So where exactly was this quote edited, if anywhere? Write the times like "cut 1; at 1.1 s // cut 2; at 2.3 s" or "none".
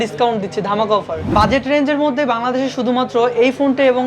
cut 1; at 1.3 s